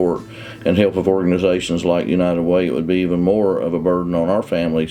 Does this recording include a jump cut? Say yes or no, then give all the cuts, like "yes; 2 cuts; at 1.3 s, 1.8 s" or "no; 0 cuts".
no; 0 cuts